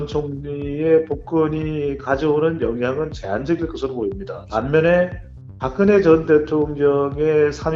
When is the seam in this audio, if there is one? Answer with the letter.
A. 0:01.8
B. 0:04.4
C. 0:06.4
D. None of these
B